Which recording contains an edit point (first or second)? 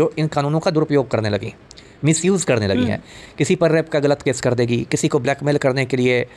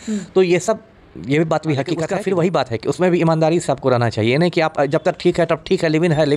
second